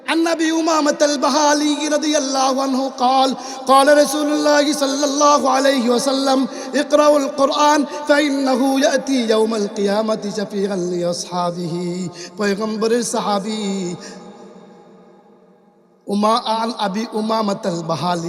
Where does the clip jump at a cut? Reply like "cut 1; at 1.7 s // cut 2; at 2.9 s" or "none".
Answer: none